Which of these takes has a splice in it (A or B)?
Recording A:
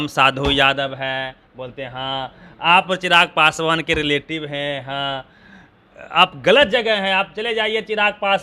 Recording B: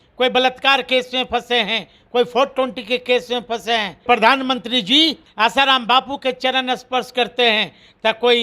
B